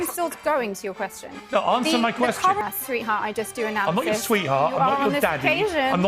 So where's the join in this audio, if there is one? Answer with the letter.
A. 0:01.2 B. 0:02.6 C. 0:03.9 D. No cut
B